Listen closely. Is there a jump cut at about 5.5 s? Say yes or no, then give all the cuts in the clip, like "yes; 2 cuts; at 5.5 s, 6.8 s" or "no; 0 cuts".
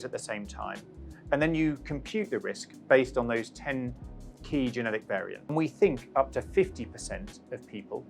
yes; 1 cut; at 5.5 s